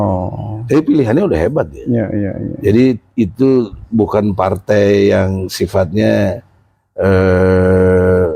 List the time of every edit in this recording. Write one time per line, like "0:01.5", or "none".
none